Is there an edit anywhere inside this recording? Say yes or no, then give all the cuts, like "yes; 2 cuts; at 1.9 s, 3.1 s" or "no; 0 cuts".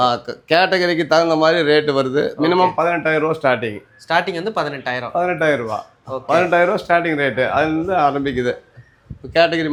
no; 0 cuts